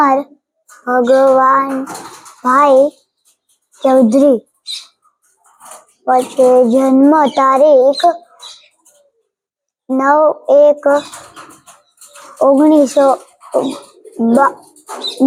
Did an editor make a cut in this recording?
no; 0 cuts

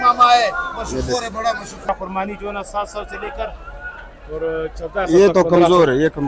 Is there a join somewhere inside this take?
yes; 1 cut; at 1.8 s

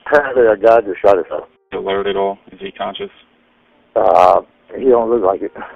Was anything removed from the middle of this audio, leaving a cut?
yes; 1 cut; at 1.6 s

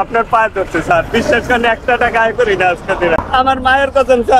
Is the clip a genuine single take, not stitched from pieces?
no; 1 cut; at 3.2 s

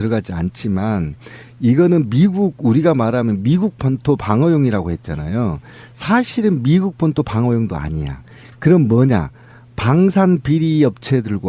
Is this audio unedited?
no; 1 cut; at 2.2 s

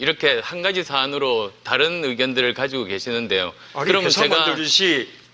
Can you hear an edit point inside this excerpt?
no; 0 cuts

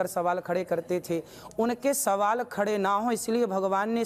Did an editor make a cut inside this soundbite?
no; 0 cuts

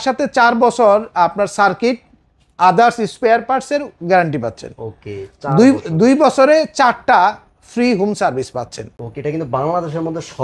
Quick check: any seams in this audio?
no; 0 cuts

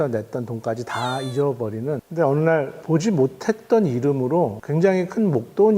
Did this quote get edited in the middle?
yes; 3 cuts; at 2.0 s, 2.8 s, 4.6 s

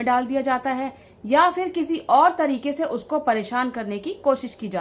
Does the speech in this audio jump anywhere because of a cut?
no; 0 cuts

